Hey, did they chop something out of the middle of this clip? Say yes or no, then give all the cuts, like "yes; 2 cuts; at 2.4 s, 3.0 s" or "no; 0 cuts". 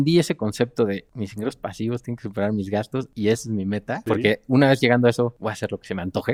no; 0 cuts